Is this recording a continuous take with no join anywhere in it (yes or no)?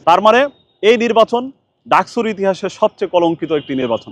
yes